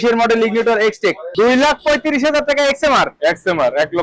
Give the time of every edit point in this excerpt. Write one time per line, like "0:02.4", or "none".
0:01.2

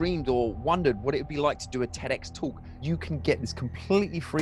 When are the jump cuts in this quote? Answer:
0:02.8

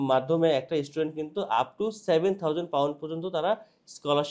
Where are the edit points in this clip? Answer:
none

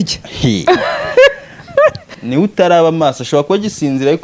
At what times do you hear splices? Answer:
0:02.1

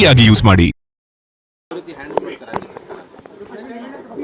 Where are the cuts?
0:01.5

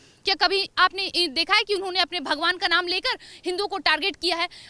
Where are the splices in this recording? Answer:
none

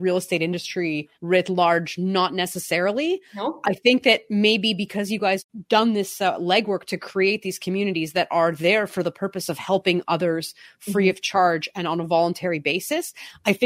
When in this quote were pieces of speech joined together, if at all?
none

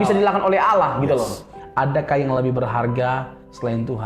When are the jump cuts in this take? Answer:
0:01.6

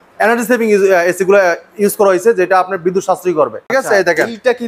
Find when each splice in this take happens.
0:03.6

